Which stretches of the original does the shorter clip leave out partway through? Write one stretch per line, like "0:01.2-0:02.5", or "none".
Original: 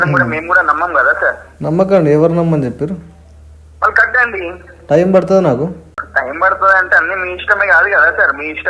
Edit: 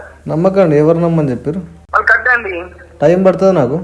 0:03.1-0:03.6